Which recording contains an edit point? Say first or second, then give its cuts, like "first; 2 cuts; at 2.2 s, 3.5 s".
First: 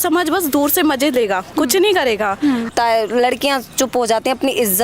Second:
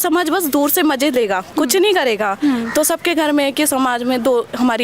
first; 1 cut; at 2.7 s